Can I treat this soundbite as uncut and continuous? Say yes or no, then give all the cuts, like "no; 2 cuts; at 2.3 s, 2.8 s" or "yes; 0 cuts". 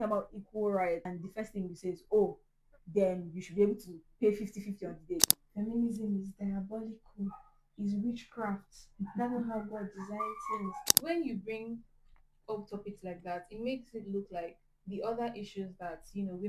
no; 3 cuts; at 1.2 s, 5.3 s, 10.9 s